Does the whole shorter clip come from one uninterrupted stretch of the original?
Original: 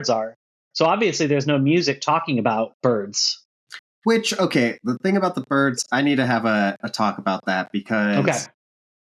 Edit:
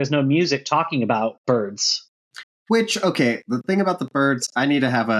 yes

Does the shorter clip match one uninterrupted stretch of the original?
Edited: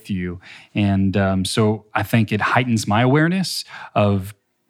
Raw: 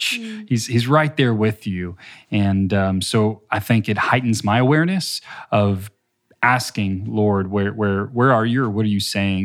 yes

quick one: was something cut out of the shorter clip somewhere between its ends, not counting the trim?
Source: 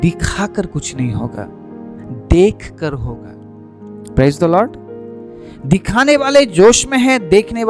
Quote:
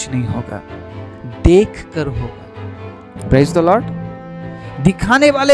no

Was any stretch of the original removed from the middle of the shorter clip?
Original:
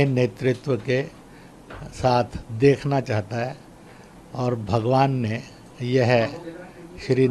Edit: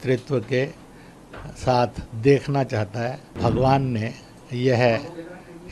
yes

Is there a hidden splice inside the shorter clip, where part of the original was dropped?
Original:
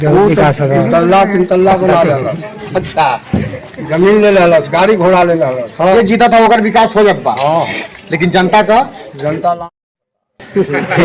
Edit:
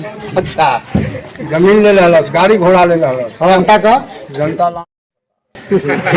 yes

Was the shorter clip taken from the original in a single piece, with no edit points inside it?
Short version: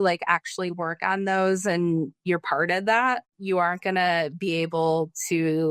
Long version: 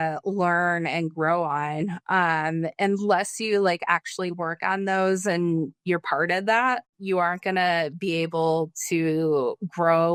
yes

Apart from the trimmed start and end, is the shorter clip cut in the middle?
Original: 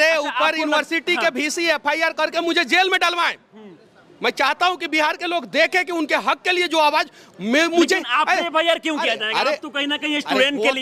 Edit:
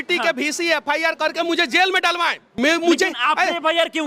yes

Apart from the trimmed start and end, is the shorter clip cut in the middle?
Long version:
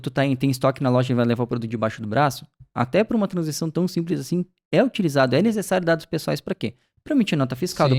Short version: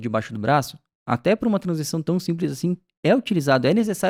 no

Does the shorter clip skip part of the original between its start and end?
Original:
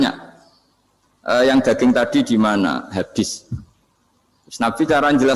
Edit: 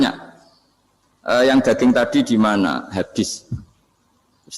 no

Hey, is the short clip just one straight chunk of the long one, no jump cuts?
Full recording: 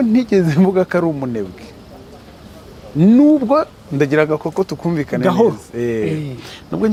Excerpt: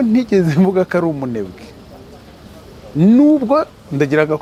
yes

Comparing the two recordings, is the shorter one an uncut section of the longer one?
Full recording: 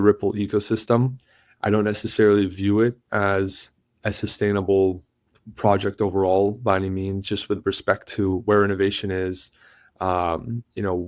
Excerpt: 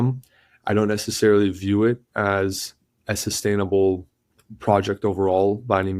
yes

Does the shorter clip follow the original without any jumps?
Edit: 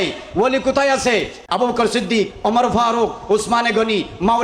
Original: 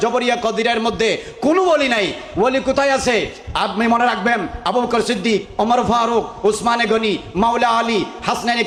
no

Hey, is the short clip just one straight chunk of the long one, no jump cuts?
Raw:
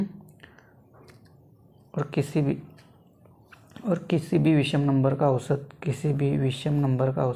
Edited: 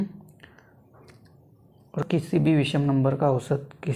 no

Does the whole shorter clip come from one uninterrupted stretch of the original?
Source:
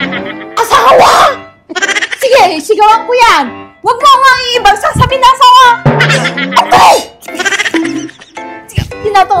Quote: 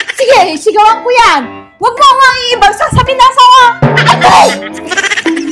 no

